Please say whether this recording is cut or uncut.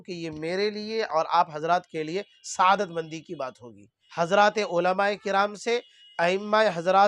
cut